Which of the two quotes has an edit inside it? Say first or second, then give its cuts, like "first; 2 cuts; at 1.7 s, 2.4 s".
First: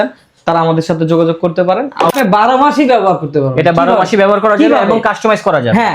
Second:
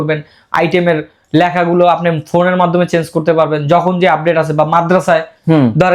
first; 1 cut; at 2.1 s